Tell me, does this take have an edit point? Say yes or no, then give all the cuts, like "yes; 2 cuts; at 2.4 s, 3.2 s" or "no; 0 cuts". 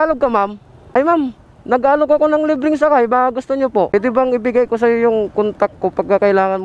yes; 1 cut; at 3.9 s